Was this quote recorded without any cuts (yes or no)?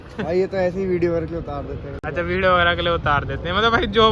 yes